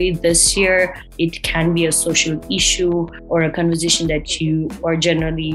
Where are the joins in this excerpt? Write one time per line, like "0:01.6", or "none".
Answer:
0:01.0
0:03.2